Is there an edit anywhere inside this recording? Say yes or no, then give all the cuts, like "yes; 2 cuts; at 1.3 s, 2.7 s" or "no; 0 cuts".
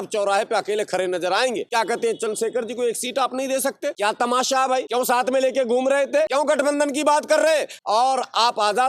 yes; 5 cuts; at 1.7 s, 3.9 s, 4.9 s, 6.3 s, 7.7 s